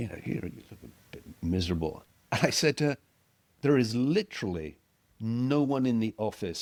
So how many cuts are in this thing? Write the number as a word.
zero